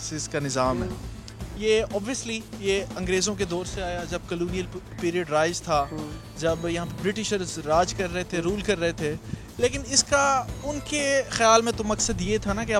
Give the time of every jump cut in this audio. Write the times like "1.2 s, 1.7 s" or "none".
none